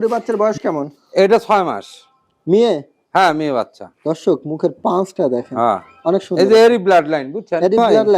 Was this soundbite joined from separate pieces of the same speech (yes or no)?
no